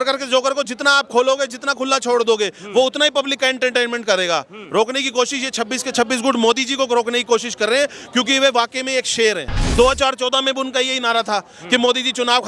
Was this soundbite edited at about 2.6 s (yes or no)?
no